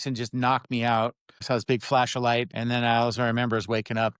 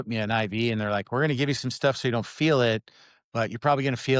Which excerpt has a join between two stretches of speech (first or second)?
first